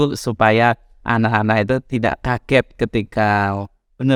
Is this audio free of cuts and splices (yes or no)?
yes